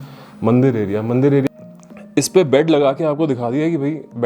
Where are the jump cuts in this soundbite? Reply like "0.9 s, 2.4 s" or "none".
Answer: 1.4 s

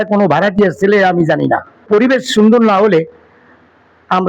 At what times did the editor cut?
1.8 s

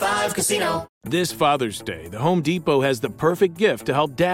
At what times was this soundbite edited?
0.9 s

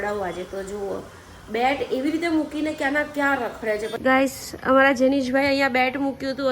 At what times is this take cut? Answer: 4.0 s

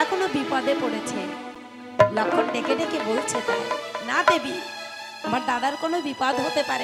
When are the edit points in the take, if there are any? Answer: none

